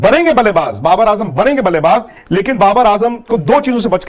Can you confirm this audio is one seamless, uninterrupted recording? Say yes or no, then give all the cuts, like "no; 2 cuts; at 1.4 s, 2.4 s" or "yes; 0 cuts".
yes; 0 cuts